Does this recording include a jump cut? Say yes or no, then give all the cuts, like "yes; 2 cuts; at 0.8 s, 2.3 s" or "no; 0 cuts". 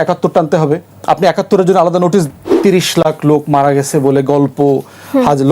yes; 1 cut; at 2.2 s